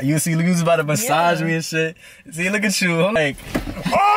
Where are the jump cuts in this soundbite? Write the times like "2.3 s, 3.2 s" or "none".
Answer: 3.2 s